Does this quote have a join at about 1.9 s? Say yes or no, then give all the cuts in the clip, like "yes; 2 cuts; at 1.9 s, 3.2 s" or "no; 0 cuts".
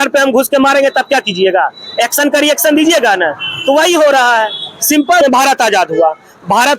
no; 1 cut; at 5.2 s